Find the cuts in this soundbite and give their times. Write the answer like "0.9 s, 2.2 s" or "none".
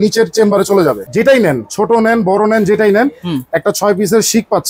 1.0 s